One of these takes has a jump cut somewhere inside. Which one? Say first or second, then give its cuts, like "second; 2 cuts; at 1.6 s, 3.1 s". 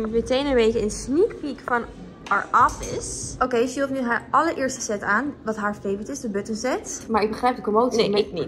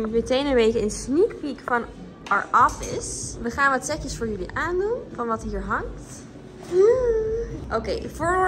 first; 2 cuts; at 3.2 s, 7.0 s